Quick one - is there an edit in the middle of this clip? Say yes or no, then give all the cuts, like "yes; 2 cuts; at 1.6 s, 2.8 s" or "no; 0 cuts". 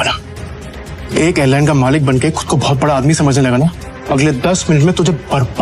yes; 1 cut; at 3.9 s